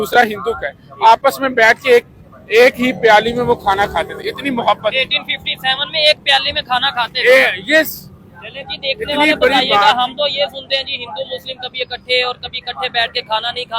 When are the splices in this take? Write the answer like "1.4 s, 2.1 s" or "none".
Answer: none